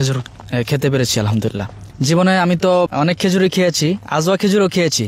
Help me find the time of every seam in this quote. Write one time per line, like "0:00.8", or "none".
0:01.8
0:02.9